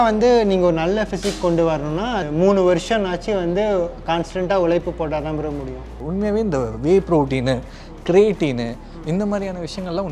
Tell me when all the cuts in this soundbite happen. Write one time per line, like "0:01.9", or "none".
0:02.2
0:05.9